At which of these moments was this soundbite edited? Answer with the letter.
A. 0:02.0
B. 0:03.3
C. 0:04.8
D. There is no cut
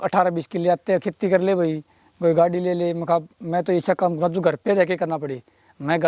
D